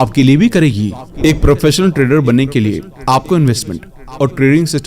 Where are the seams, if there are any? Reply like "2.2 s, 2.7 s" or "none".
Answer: 1.1 s